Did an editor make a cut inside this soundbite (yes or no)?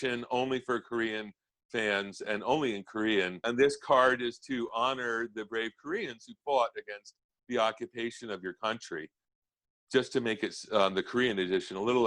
yes